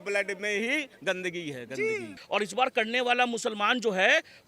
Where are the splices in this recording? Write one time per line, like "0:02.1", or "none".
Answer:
0:02.2

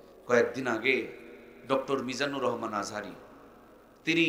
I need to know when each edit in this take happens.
none

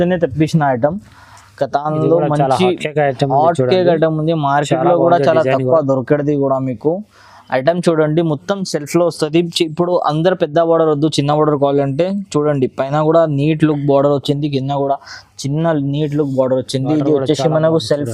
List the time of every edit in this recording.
none

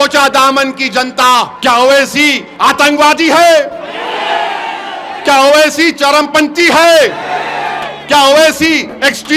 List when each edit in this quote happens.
0:01.5
0:02.4

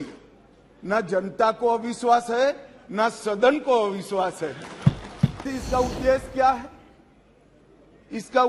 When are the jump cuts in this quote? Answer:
0:05.4

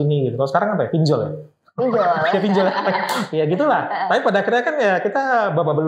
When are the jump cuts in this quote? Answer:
none

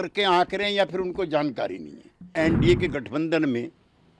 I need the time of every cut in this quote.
0:02.3

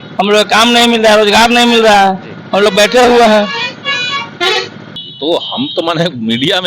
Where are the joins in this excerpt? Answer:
0:05.0

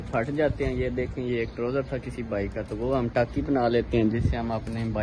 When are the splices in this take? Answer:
0:04.0

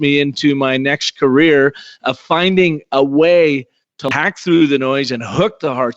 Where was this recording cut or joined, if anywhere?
0:04.2

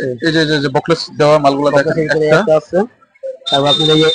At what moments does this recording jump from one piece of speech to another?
none

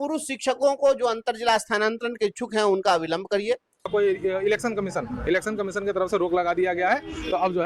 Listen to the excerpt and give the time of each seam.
0:03.8

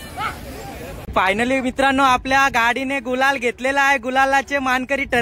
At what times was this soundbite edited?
0:01.1

